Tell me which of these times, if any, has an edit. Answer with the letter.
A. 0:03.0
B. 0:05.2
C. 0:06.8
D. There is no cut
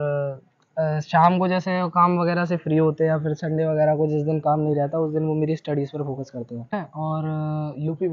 C